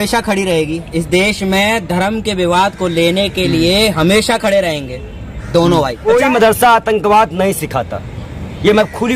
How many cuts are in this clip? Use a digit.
1